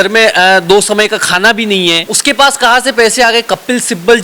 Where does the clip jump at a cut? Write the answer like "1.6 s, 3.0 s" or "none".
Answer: 2.1 s